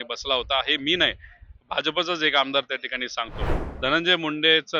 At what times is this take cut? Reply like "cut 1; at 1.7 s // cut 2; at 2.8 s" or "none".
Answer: cut 1; at 3.6 s